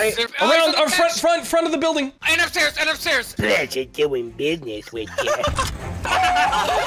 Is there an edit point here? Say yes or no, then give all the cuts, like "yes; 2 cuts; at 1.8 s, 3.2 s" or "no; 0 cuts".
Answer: yes; 1 cut; at 5.9 s